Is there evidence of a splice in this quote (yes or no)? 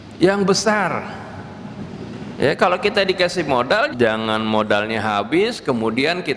yes